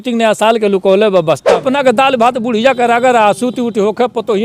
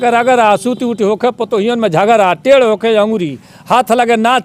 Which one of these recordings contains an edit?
first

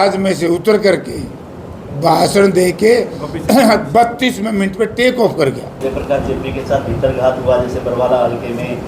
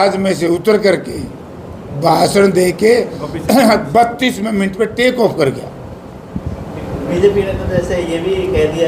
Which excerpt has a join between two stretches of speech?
first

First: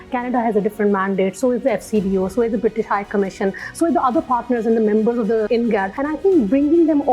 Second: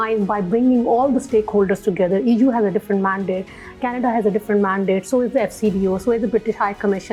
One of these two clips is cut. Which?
first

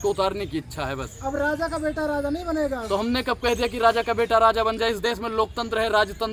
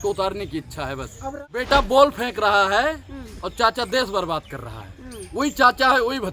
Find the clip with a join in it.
second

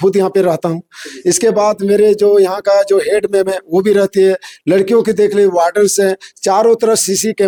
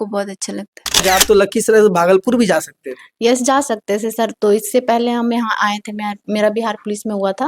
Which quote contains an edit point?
second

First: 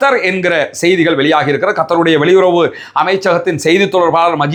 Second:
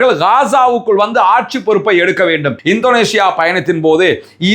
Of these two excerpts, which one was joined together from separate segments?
second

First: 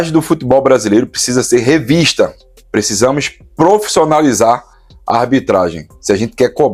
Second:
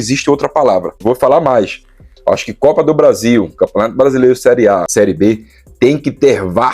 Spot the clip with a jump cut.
second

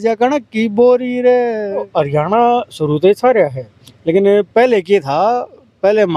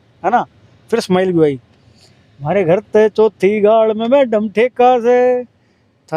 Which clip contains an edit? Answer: first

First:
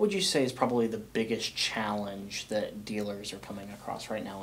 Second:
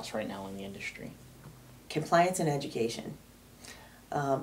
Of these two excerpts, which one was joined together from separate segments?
second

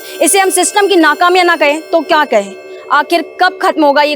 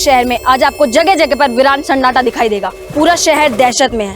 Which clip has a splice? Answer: second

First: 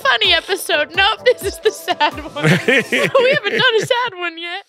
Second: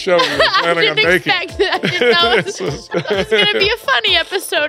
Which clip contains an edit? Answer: second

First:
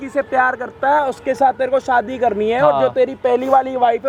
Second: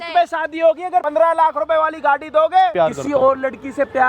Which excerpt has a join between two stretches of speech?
second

